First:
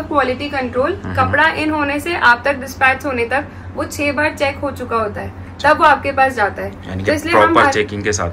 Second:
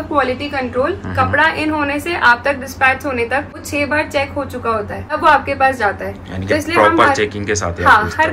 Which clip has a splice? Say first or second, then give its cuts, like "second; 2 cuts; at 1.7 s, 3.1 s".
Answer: second; 2 cuts; at 3.6 s, 5.2 s